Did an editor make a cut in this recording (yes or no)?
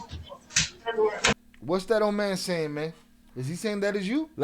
no